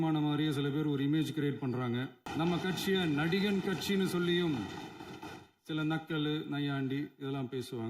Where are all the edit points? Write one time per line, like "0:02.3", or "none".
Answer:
0:02.2